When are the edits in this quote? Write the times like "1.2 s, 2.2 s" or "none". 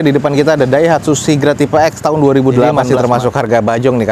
2.9 s